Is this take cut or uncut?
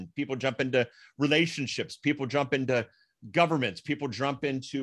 uncut